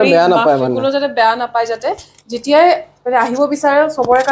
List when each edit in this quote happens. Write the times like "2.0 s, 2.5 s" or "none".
none